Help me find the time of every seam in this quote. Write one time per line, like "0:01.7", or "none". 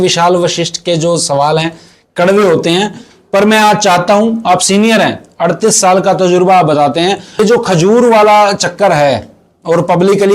0:07.4

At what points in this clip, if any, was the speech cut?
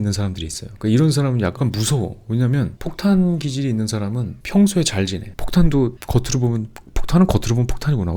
0:01.6

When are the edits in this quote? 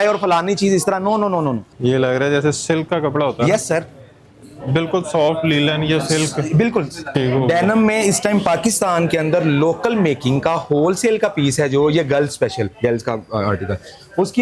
0:01.7
0:07.1

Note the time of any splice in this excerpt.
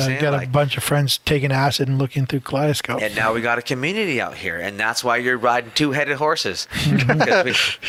none

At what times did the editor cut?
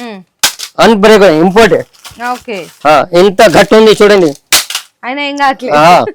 none

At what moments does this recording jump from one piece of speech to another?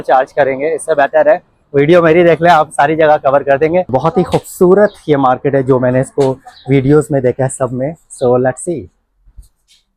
0:03.9

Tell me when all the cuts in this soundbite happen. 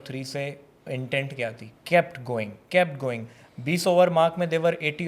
0:01.7

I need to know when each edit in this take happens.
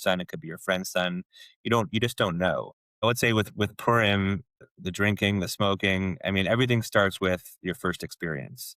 0:03.0
0:04.7

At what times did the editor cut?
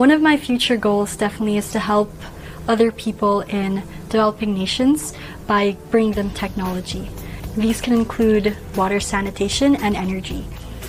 none

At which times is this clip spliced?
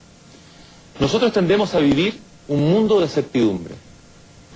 0:01.1

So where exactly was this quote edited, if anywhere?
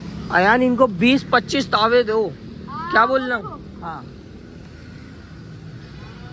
none

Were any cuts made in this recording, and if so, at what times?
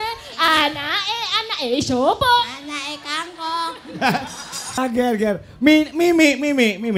0:04.8

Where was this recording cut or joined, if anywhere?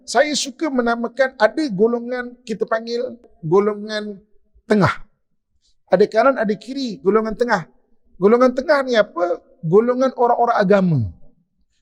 0:03.3

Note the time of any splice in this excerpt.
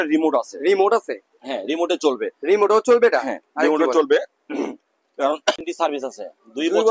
0:05.6

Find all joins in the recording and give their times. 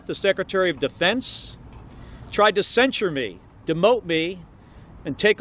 none

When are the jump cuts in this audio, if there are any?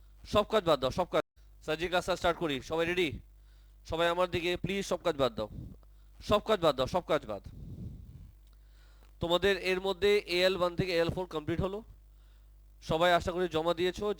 0:01.3

